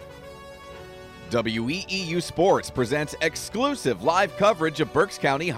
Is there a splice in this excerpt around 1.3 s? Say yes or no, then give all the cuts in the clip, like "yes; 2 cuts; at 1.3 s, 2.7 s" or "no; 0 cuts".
yes; 1 cut; at 1.3 s